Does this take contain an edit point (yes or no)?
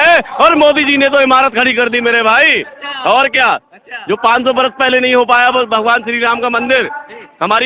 no